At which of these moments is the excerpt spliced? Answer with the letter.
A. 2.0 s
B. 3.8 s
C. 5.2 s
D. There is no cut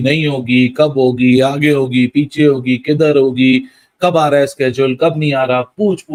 D